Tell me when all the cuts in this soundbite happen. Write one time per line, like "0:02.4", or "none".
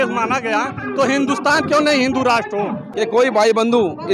0:02.8